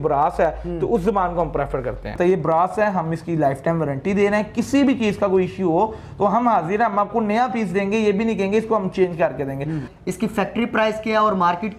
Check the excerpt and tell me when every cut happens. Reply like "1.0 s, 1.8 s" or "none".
2.1 s, 9.9 s